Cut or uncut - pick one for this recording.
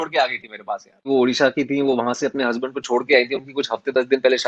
cut